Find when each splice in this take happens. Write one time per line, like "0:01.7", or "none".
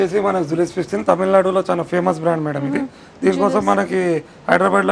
none